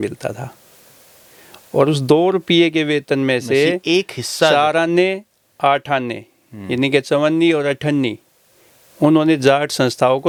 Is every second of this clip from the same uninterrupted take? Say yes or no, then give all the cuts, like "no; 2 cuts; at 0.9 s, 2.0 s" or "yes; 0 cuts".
yes; 0 cuts